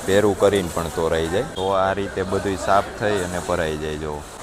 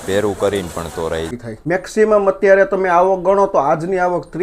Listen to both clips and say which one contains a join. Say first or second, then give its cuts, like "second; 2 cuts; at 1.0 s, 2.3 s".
second; 1 cut; at 1.4 s